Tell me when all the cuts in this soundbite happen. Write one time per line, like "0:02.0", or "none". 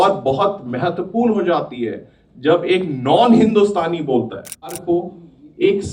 0:04.8